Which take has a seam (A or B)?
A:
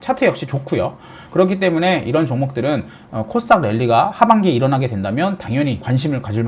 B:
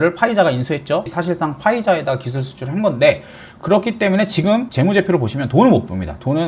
B